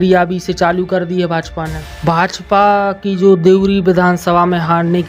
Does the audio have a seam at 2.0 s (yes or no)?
yes